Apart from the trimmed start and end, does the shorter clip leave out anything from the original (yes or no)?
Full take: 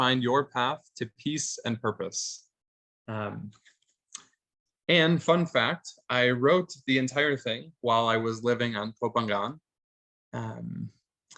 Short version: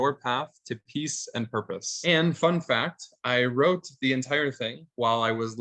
yes